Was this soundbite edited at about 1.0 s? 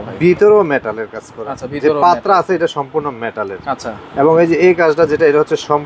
no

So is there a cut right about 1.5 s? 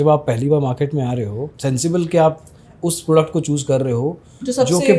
yes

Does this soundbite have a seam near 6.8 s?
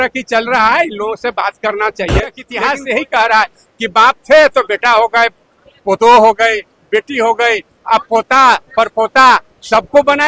no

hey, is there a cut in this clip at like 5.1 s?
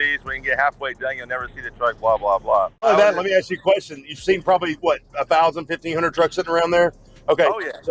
no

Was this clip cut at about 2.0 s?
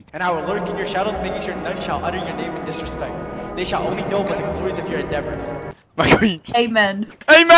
no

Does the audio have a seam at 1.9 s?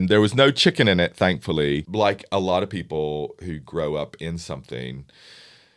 yes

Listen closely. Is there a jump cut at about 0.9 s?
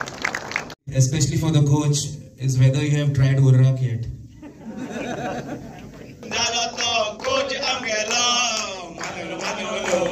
yes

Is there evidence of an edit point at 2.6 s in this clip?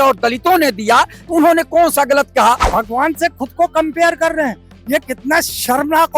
yes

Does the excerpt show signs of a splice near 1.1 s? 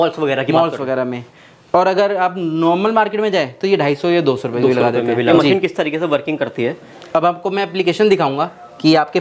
no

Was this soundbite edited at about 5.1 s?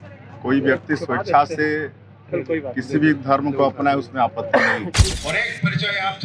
yes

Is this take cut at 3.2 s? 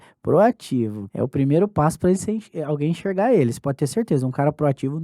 no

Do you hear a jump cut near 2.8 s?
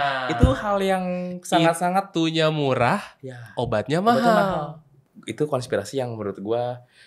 no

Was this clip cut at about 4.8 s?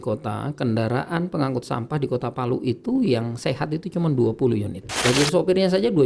yes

